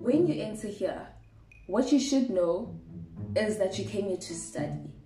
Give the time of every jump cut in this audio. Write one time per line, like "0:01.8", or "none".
none